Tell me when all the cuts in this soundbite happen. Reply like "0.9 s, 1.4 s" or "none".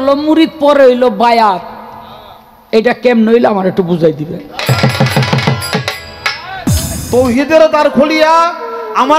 6.9 s